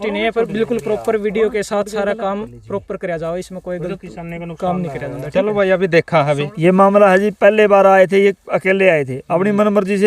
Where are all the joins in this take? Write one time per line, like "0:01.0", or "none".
0:06.5